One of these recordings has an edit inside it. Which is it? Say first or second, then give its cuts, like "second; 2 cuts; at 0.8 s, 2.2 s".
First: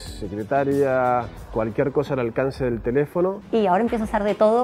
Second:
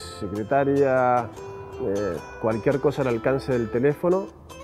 first; 2 cuts; at 1.4 s, 3.4 s